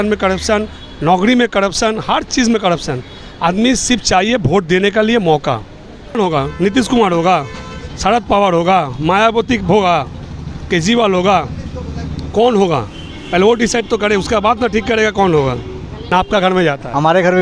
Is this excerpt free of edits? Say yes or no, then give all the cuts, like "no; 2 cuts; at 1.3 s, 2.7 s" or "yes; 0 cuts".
no; 2 cuts; at 6.2 s, 15.9 s